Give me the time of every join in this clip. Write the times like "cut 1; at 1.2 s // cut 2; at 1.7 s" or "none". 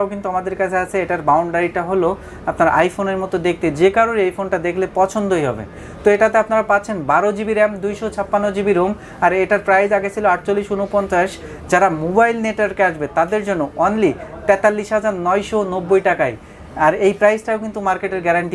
none